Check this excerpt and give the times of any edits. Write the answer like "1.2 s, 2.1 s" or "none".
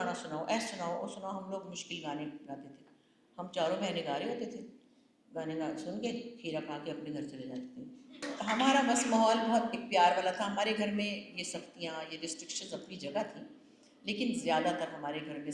8.2 s